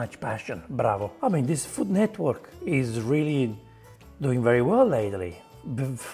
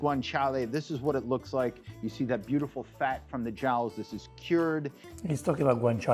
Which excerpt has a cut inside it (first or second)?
first